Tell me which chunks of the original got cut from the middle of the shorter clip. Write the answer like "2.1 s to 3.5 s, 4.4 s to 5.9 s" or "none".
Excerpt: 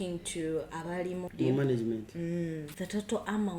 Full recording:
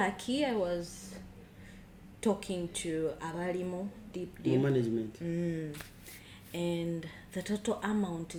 3.8 s to 4.3 s, 5.8 s to 7.3 s